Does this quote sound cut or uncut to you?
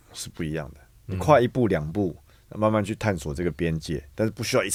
uncut